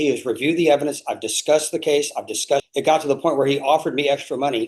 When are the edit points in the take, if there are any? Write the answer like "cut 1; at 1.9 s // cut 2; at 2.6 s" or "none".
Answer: cut 1; at 2.7 s